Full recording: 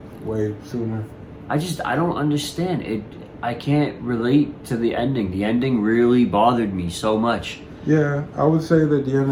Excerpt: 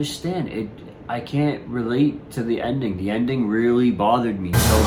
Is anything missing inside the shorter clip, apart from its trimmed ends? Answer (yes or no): no